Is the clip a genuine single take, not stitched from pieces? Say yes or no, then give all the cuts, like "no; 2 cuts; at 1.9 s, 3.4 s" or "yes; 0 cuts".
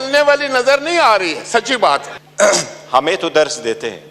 no; 1 cut; at 2.2 s